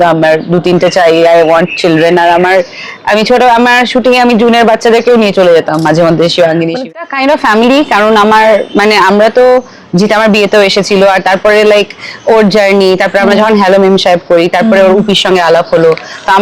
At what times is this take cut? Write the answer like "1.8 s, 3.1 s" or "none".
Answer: 6.8 s